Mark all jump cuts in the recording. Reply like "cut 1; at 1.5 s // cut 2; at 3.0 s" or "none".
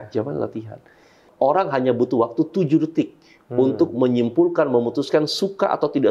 cut 1; at 1.2 s